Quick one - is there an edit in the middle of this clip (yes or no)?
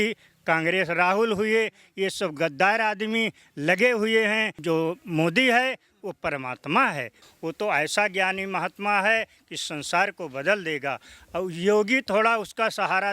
yes